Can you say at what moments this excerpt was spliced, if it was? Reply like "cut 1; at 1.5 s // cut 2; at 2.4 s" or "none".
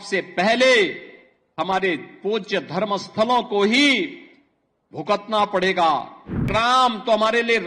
cut 1; at 6.5 s